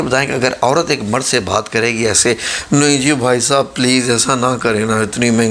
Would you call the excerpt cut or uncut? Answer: uncut